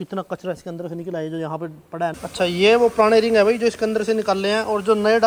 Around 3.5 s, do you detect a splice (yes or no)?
no